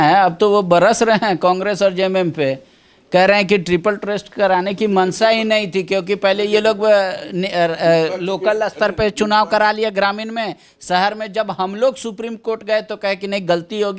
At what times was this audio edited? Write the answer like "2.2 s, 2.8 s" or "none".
none

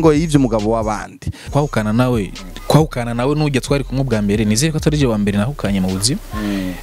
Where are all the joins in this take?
1.5 s

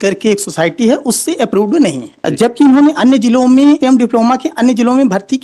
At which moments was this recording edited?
2.1 s, 3.8 s

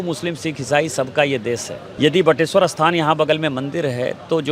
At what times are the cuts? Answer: 1.8 s

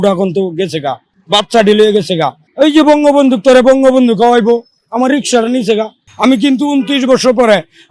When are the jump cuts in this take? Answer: 1.1 s, 2.4 s, 6.0 s

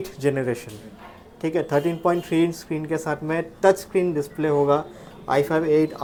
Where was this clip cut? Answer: none

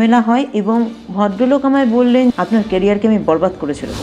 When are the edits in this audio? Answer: 2.3 s

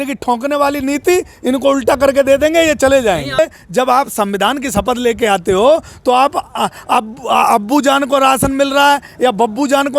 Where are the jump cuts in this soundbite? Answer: 3.4 s

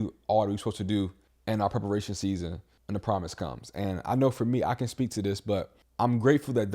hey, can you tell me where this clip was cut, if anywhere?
1.3 s, 2.7 s, 5.8 s

